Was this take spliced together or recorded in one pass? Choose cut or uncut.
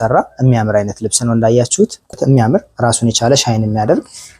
cut